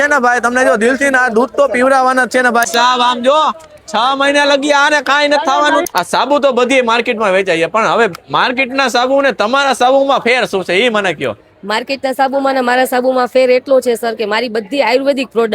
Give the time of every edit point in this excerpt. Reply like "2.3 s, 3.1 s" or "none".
2.7 s, 5.8 s